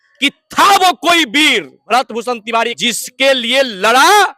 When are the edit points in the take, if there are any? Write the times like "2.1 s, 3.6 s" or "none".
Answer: 1.8 s, 2.8 s

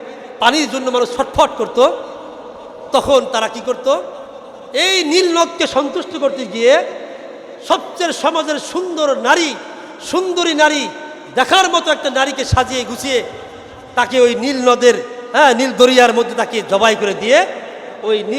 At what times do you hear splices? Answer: none

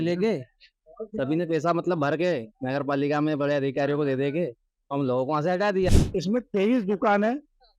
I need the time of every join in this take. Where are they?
6.0 s

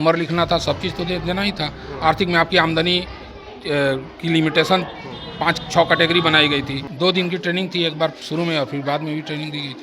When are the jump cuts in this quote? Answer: 6.8 s

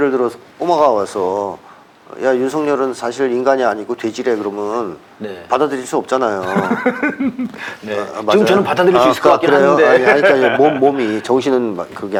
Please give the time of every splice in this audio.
none

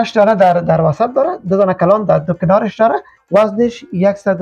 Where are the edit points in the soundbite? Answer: 3.1 s

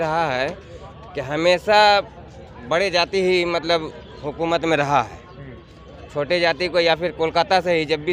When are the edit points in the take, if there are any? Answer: none

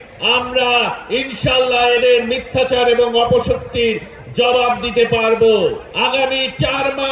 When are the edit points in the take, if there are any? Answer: 5.9 s

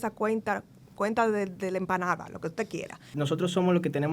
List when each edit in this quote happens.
3.0 s

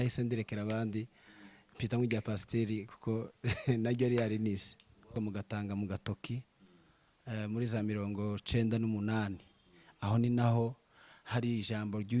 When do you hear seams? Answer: 5.1 s

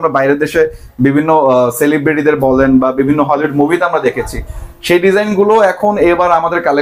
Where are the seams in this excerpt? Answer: none

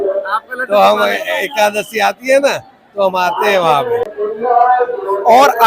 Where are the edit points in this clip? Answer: 4.1 s

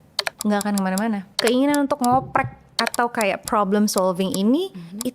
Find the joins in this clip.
1.3 s

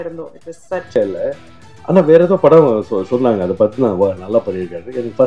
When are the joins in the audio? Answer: 1.0 s

